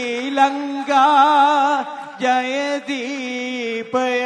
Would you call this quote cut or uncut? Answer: uncut